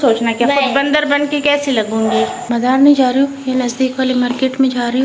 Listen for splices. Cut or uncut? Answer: cut